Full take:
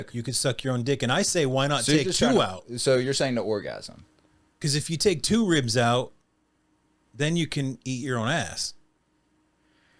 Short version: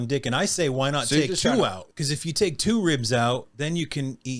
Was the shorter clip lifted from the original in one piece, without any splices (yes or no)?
no